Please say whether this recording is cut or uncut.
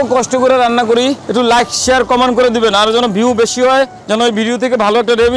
cut